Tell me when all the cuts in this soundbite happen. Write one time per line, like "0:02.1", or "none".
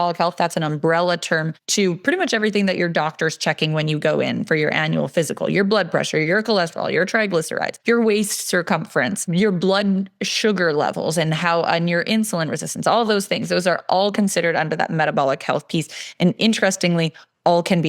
0:01.6
0:07.7
0:09.3